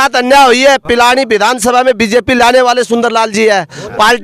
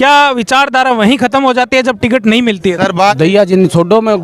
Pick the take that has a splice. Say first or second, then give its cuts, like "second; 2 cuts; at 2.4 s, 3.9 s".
second; 1 cut; at 2.9 s